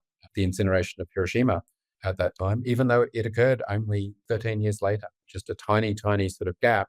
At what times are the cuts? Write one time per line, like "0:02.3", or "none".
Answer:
0:02.0
0:04.2
0:05.3